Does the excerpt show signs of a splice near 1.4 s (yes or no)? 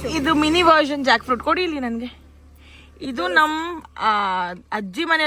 no